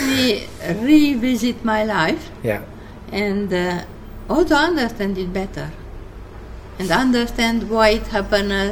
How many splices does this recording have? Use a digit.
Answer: 0